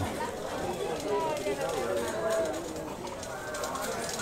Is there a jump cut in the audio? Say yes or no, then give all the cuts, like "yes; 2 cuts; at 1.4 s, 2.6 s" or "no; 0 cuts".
no; 0 cuts